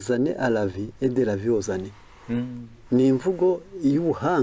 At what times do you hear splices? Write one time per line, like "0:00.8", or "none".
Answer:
none

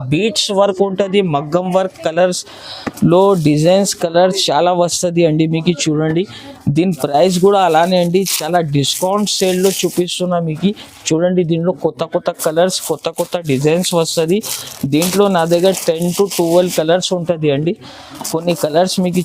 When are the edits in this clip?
none

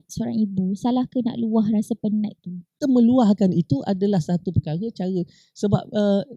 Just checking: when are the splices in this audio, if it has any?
0:02.8

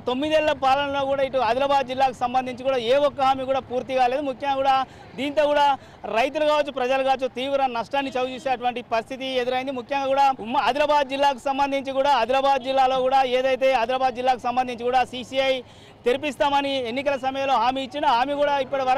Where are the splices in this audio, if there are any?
0:10.4

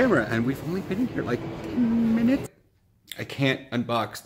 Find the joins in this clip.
0:02.5

